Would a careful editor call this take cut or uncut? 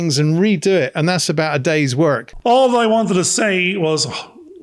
cut